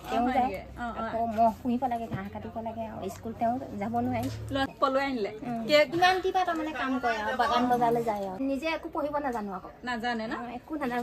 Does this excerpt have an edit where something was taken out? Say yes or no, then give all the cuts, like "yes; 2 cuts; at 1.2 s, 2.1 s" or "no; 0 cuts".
yes; 3 cuts; at 4.7 s, 5.9 s, 8.4 s